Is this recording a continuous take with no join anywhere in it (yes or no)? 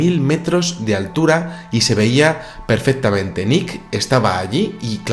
yes